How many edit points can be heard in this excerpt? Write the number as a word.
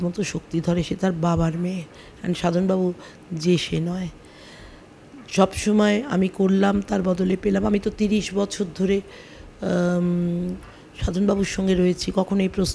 one